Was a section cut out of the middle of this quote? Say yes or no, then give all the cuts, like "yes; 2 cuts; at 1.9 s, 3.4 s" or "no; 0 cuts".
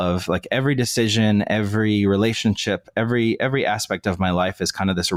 no; 0 cuts